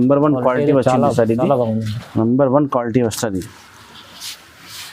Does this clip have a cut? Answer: no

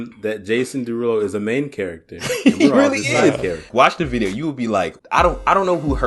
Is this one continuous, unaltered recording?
no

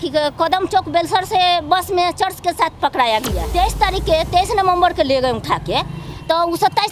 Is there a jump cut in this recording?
yes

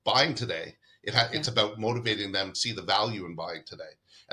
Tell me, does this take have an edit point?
yes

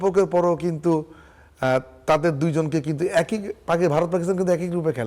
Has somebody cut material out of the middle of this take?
no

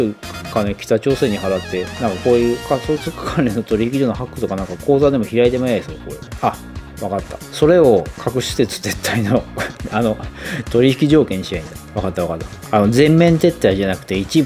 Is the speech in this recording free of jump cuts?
yes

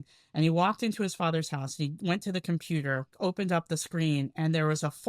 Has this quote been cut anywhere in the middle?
yes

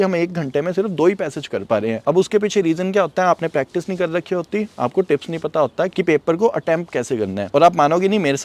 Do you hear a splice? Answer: no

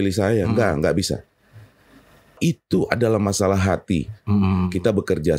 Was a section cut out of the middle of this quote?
yes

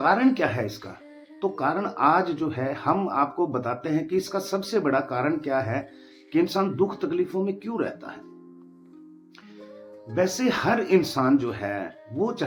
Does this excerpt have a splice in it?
no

